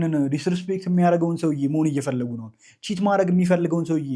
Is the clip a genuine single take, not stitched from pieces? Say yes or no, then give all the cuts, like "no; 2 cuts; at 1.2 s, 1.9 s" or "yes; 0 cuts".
yes; 0 cuts